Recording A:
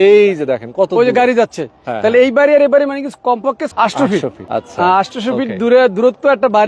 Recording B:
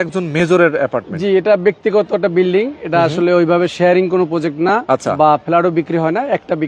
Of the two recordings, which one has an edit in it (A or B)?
A